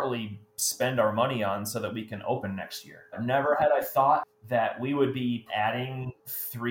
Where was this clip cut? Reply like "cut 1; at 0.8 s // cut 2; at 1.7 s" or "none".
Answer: cut 1; at 3.1 s // cut 2; at 4.3 s // cut 3; at 5.4 s